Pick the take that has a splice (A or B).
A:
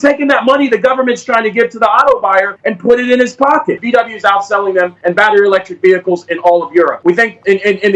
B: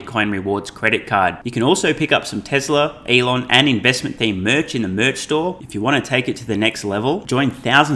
A